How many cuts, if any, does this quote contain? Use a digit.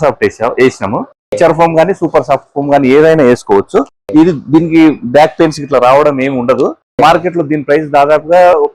2